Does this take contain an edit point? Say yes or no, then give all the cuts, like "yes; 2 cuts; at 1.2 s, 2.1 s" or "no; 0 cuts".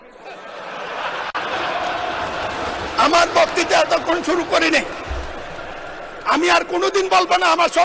no; 0 cuts